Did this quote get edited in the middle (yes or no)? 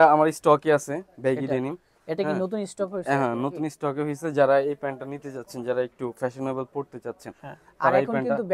no